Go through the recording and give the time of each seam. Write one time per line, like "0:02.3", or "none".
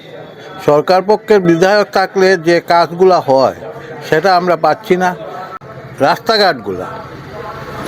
0:05.6